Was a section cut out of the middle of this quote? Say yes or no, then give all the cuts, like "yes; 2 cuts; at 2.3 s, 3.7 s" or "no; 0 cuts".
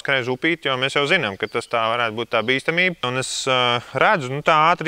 no; 0 cuts